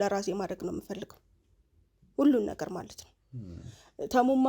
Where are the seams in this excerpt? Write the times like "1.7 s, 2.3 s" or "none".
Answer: none

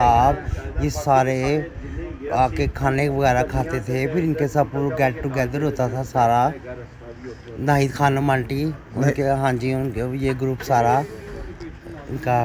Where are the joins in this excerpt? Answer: none

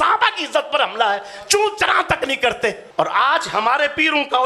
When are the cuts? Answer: 2.9 s

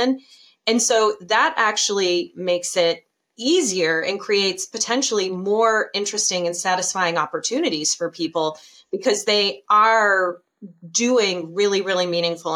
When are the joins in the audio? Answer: none

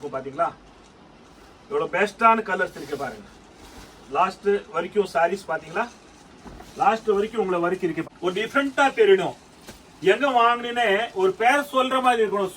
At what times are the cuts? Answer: 8.0 s

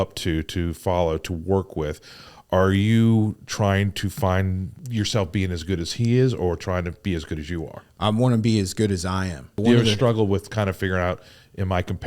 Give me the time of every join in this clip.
4.8 s, 9.6 s

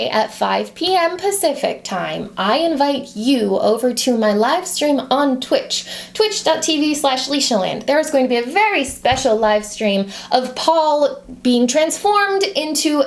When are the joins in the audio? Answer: 10.2 s

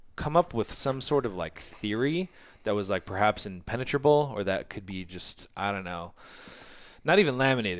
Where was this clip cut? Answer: none

